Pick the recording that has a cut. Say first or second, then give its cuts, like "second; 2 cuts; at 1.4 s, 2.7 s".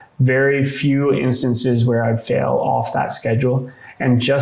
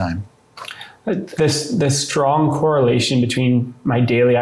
second; 1 cut; at 1.3 s